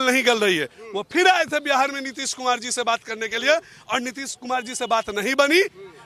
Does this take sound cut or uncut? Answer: uncut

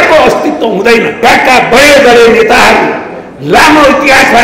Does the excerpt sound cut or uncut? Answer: cut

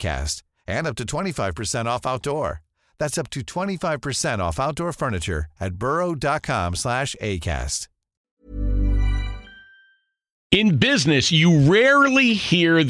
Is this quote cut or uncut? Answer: cut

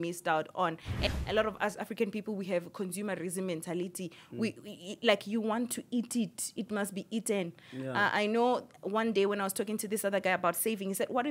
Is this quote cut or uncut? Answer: cut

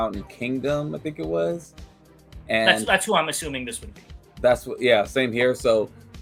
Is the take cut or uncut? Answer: uncut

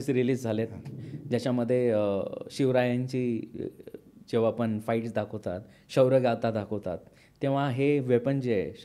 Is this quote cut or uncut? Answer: uncut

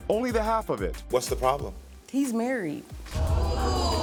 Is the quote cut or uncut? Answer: uncut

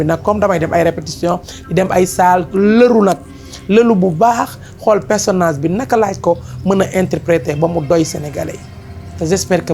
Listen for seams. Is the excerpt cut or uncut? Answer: uncut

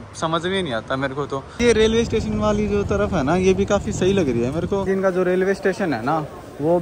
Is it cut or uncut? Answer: cut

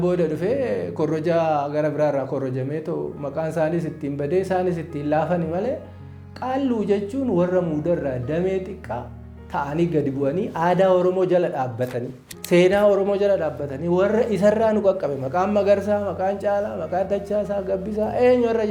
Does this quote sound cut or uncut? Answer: uncut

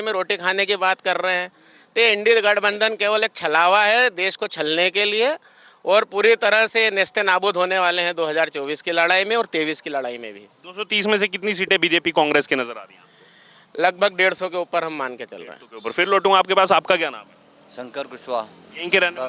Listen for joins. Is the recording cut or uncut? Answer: uncut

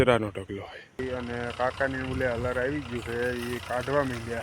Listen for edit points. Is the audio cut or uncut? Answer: cut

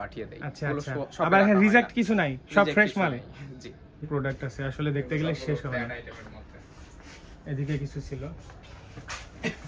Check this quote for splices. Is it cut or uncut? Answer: cut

